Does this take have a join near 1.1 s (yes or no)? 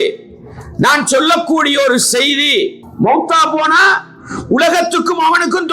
no